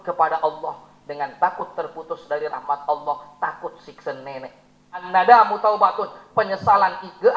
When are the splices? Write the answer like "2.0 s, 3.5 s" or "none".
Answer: 5.1 s